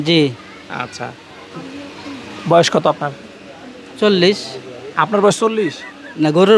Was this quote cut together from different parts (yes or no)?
no